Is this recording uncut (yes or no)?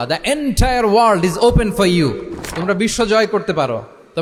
yes